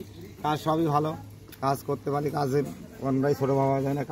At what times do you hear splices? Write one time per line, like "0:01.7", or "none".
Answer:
none